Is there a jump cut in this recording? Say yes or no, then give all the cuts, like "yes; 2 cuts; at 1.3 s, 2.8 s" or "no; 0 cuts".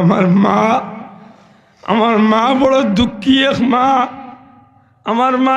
no; 0 cuts